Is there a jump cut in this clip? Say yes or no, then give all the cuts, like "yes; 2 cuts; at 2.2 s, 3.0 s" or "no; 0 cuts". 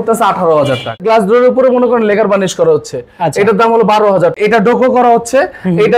yes; 2 cuts; at 1.0 s, 4.4 s